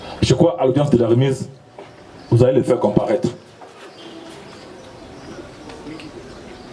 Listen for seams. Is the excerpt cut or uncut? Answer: uncut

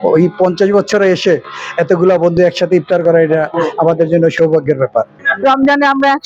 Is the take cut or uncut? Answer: cut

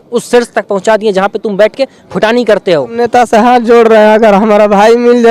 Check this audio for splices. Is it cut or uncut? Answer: cut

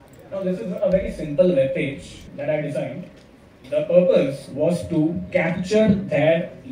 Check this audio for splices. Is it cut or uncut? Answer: uncut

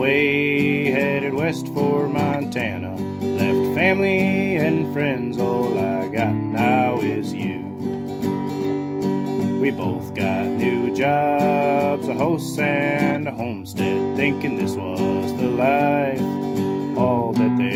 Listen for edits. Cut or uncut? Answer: uncut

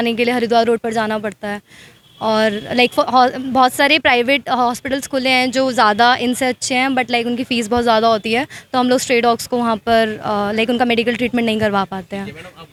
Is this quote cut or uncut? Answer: uncut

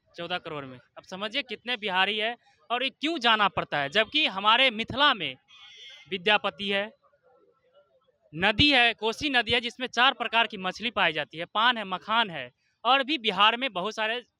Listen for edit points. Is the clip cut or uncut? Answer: uncut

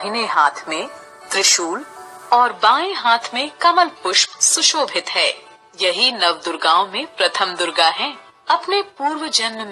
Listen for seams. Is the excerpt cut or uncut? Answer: uncut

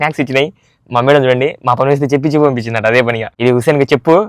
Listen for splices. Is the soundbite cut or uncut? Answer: cut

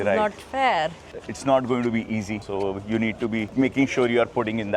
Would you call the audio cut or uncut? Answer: cut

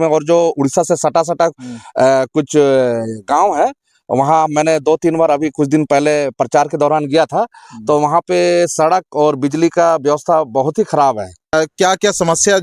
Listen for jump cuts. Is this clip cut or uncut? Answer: cut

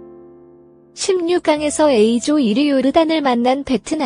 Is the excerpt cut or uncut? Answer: cut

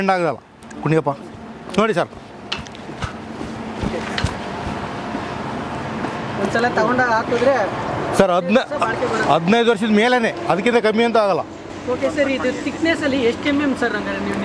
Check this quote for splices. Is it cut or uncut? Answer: uncut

